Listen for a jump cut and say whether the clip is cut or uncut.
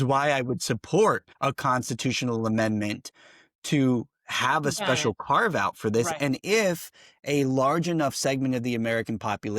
cut